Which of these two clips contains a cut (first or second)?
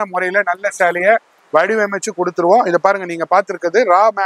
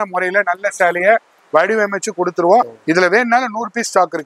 second